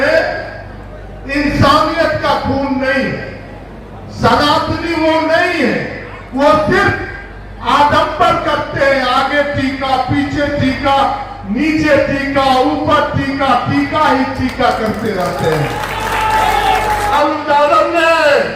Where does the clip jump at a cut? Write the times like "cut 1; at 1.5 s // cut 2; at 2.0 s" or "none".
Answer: cut 1; at 17.1 s